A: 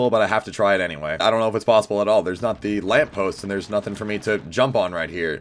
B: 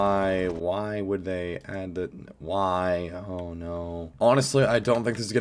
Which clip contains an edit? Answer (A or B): B